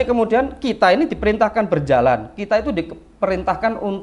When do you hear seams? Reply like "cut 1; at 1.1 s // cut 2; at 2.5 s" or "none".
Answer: none